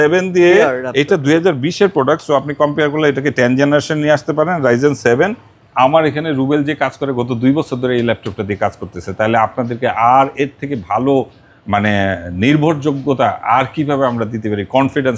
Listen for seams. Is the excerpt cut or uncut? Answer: uncut